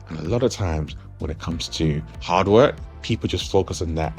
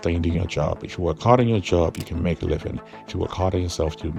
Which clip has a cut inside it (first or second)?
first